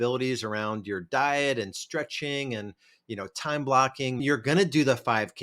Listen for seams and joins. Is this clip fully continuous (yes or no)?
no